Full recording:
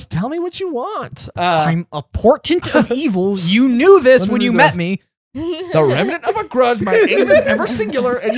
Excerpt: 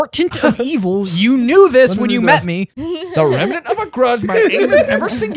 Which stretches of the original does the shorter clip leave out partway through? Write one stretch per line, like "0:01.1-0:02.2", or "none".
0:05.0-0:05.3